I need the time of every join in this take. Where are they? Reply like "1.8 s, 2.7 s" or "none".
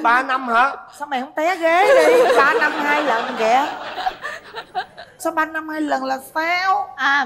none

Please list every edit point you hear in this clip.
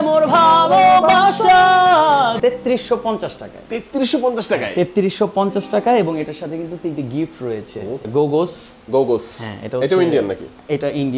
2.3 s, 8.0 s

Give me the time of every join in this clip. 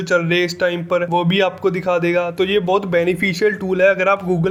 none

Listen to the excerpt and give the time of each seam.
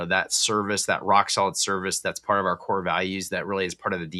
none

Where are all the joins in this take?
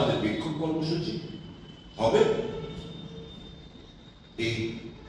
none

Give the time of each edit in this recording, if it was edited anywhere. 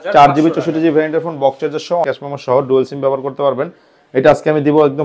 2.1 s

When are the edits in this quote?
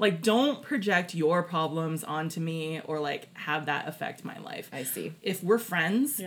5.1 s

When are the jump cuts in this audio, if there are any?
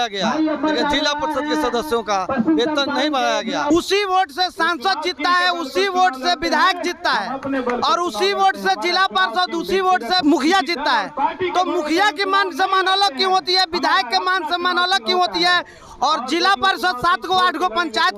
3.7 s, 10.2 s

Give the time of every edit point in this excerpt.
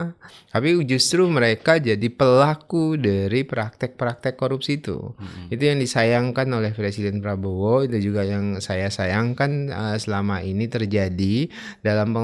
none

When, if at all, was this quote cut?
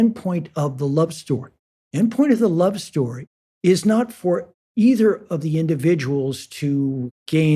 4.6 s

